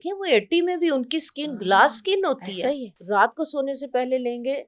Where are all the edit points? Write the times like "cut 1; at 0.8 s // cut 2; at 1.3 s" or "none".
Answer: cut 1; at 2.9 s